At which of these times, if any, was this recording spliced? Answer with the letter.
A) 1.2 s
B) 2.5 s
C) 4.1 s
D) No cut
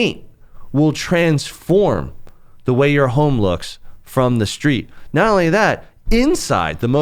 D